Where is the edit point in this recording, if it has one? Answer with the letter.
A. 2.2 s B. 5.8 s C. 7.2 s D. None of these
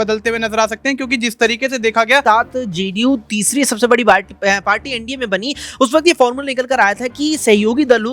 A